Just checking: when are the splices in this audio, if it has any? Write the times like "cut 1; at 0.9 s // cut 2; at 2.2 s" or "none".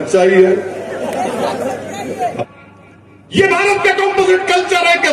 cut 1; at 2.4 s